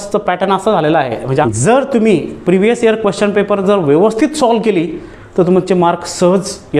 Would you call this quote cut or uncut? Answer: cut